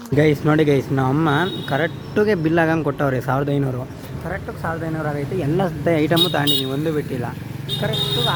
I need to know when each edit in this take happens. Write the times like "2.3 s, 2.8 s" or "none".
none